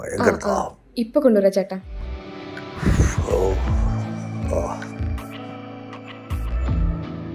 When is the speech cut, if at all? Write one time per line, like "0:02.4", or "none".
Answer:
none